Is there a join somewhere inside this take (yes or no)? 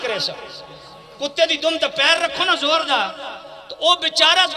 no